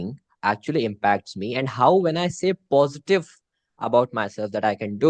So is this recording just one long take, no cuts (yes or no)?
yes